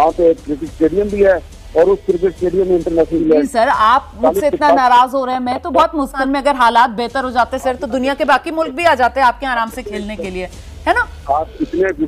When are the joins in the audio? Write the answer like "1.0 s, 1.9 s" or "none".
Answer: 3.2 s, 6.2 s